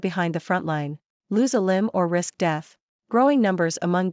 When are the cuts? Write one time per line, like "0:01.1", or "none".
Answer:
0:01.2

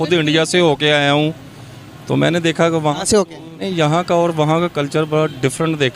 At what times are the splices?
0:03.7

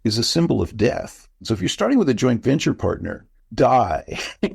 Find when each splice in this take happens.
0:01.3

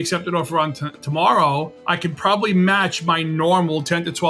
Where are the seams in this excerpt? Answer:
none

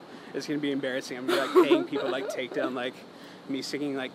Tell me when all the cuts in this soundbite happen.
none

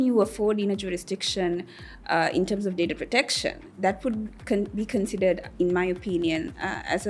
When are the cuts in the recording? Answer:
none

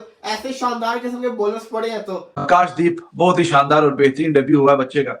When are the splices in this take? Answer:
0:02.5

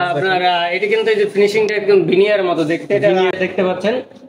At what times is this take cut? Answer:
0:03.3

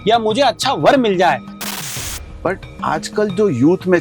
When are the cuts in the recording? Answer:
0:01.7

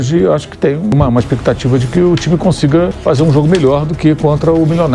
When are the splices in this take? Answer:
0:00.9
0:03.0

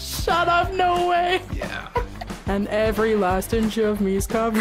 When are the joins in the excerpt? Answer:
0:02.2

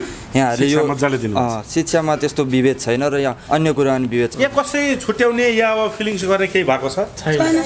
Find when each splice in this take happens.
0:03.4
0:04.3

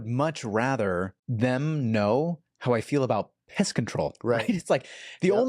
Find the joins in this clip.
0:01.2

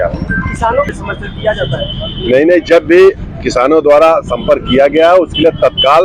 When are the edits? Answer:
0:01.0

